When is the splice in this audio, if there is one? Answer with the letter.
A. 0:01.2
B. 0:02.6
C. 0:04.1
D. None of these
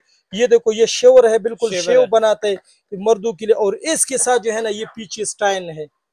D